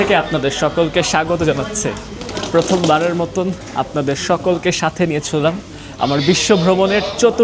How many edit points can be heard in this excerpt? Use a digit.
0